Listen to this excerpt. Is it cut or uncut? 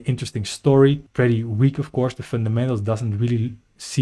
cut